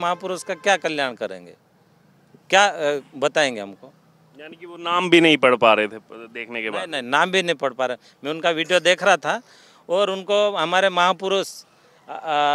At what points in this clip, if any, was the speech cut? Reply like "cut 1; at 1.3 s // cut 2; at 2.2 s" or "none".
none